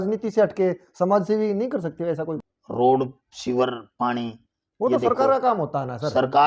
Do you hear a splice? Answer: yes; 1 cut; at 2.4 s

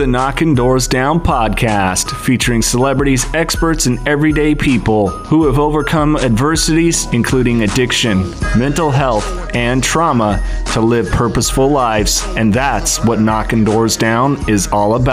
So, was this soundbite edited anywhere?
no; 0 cuts

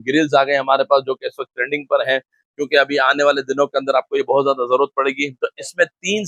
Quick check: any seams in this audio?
no; 0 cuts

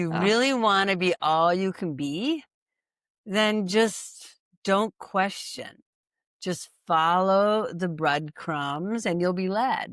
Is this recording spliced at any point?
no; 0 cuts

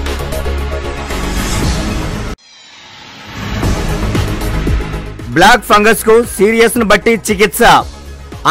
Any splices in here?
no; 0 cuts

